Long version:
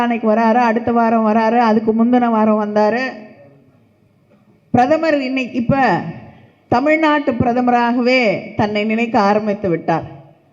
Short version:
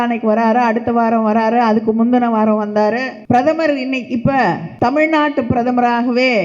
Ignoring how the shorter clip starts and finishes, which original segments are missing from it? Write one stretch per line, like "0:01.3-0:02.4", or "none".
0:03.1-0:04.6
0:06.1-0:06.6